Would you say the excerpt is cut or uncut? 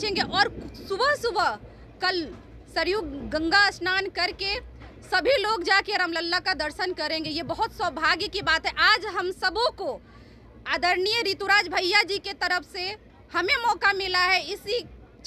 uncut